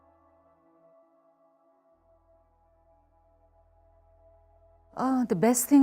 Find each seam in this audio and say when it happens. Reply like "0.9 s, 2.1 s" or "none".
none